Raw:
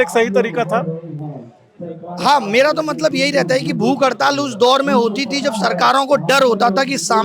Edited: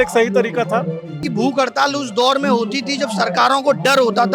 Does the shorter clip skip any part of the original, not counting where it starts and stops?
yes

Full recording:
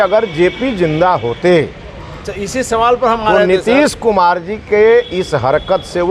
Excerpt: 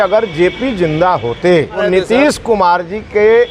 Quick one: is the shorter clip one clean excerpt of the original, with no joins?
no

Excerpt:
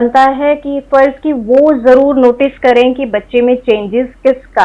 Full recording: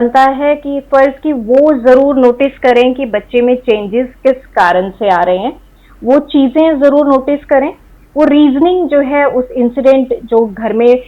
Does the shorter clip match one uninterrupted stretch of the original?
yes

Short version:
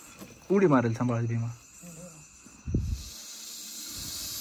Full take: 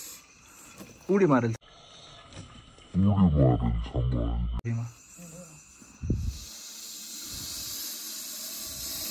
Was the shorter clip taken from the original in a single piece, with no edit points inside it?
no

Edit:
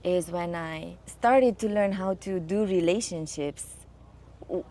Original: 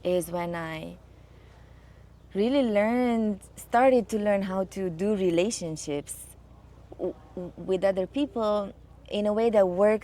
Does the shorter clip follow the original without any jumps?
no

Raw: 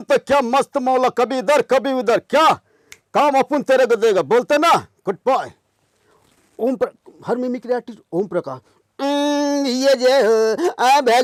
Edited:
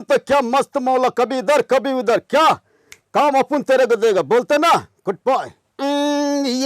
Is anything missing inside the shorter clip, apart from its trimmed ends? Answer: yes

